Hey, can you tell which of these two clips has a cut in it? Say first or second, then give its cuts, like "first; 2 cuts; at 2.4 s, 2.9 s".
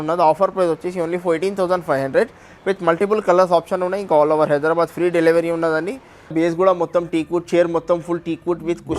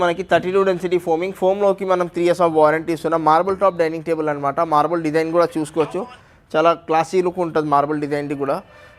first; 1 cut; at 6.3 s